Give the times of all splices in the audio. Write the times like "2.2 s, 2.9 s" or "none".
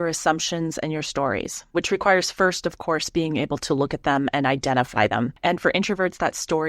1.7 s, 5.3 s